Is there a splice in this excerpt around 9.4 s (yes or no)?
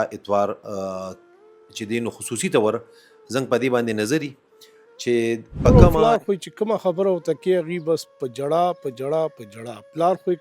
no